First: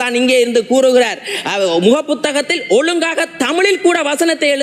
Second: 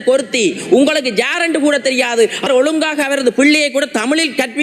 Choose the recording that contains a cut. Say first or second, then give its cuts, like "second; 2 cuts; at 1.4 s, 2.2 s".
second; 1 cut; at 2.5 s